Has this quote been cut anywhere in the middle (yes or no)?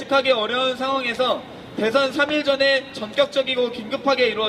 yes